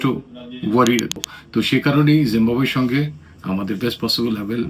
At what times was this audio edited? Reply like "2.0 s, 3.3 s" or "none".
1.2 s